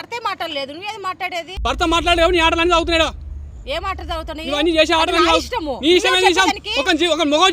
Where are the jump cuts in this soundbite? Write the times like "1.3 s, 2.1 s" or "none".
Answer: 1.5 s